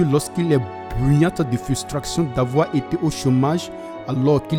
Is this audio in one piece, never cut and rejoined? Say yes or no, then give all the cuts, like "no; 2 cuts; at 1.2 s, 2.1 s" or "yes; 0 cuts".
yes; 0 cuts